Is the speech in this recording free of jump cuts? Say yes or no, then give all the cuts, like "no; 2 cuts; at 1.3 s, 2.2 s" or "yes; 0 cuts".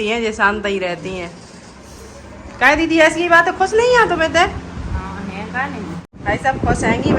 no; 1 cut; at 6.0 s